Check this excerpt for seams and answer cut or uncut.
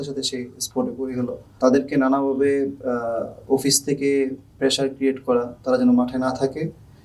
cut